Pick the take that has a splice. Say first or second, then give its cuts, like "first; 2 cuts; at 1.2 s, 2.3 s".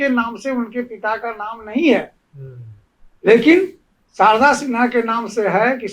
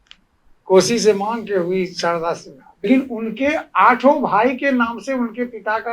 second; 1 cut; at 2.8 s